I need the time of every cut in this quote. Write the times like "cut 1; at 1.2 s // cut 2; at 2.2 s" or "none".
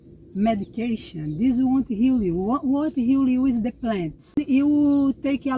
cut 1; at 4.4 s

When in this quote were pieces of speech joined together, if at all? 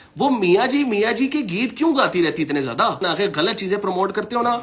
cut 1; at 3.0 s

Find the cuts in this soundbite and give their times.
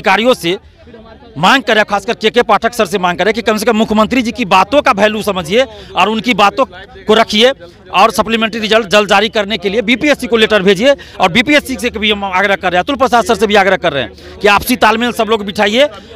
none

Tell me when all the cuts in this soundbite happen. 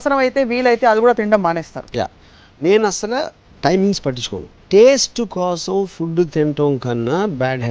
cut 1; at 4.6 s

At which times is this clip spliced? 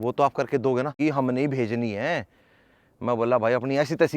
cut 1; at 0.9 s

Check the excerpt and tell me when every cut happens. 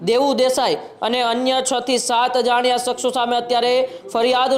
none

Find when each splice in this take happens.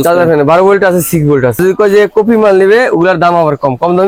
cut 1; at 1.6 s

